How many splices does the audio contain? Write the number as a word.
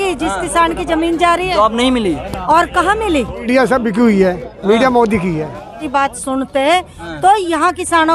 two